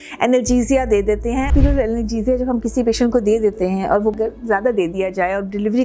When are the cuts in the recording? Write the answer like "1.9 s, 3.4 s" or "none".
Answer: 1.5 s

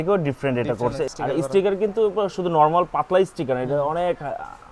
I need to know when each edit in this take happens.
1.1 s

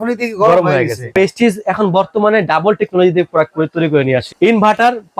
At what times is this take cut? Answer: 1.1 s, 4.3 s

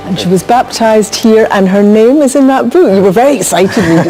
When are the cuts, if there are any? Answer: none

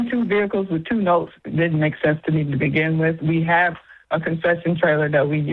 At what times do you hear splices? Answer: none

